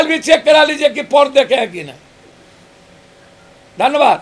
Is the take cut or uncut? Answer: uncut